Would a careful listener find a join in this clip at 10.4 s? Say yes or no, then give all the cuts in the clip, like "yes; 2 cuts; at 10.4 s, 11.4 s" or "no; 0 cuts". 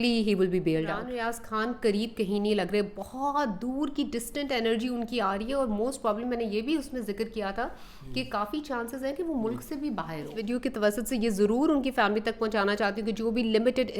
yes; 2 cuts; at 1.1 s, 10.4 s